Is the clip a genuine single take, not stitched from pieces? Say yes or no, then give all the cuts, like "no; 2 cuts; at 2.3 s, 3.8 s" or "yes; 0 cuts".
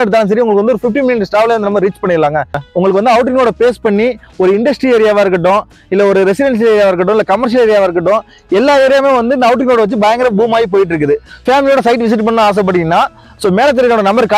no; 2 cuts; at 2.6 s, 11.4 s